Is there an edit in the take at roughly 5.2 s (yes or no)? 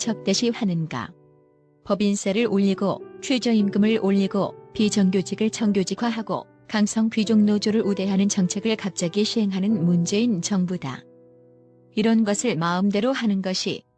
no